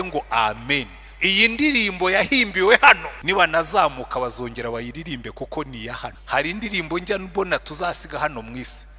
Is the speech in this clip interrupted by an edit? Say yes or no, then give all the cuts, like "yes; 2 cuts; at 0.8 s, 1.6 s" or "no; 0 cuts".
yes; 2 cuts; at 3.1 s, 6.2 s